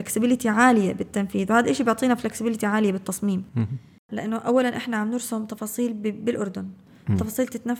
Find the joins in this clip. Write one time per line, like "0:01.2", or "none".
0:04.1